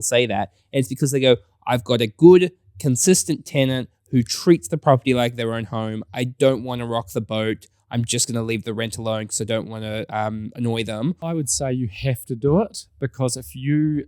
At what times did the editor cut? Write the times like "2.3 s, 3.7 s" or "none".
11.3 s